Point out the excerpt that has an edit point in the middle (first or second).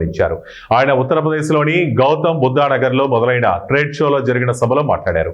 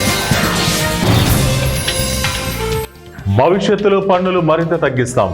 second